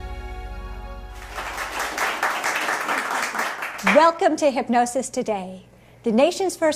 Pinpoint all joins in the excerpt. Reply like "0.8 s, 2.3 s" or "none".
1.1 s